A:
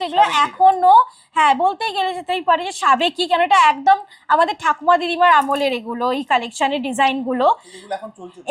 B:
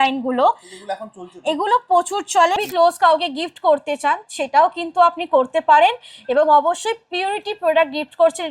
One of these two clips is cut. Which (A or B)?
B